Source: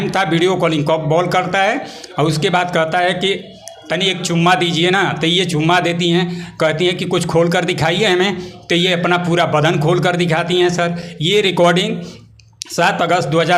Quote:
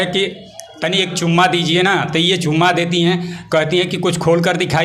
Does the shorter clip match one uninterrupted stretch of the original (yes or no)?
yes